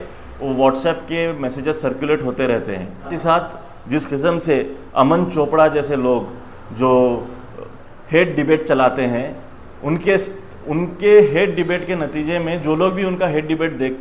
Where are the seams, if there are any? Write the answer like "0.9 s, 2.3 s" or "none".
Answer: 3.1 s

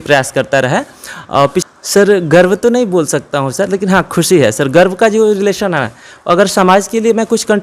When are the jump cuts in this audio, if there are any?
1.6 s

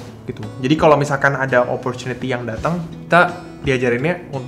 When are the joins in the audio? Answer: 2.9 s

